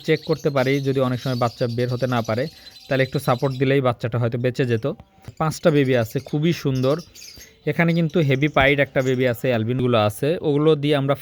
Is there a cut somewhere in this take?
yes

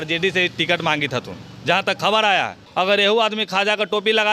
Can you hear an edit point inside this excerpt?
yes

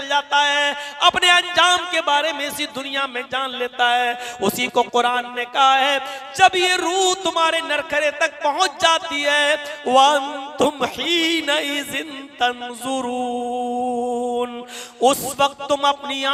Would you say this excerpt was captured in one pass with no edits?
yes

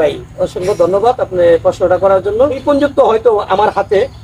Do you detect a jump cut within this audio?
yes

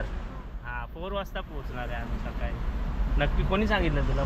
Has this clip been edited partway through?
no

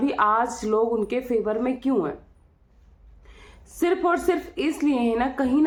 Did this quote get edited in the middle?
no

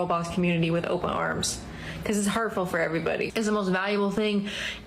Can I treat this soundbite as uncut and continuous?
no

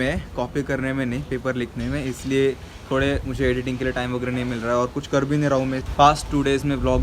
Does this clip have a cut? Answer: yes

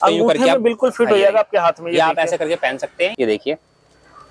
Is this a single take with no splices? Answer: no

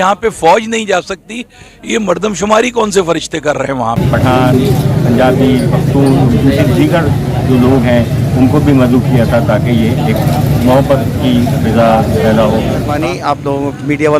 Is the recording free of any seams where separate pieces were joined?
no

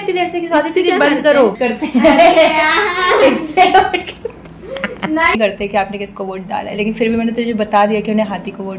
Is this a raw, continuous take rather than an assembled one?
no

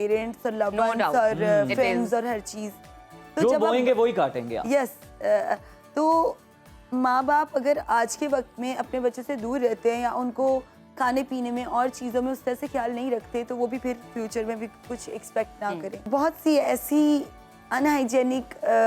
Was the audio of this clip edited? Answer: yes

